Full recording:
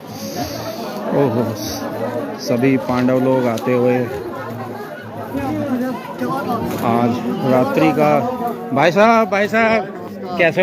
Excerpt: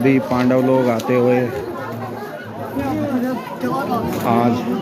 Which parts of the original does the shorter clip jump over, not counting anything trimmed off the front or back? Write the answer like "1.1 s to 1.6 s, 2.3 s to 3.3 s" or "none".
none